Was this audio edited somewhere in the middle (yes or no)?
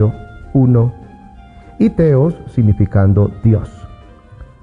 yes